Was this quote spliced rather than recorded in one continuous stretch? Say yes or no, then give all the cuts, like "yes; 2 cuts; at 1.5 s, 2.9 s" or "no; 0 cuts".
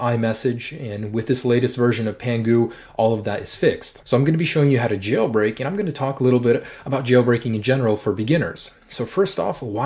no; 0 cuts